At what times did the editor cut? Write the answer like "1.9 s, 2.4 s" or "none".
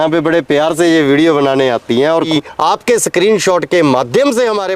2.3 s